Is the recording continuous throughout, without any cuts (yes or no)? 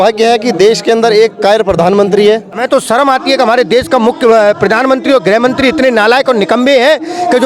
no